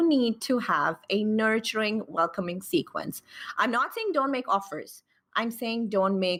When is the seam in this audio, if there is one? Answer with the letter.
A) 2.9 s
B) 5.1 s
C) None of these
C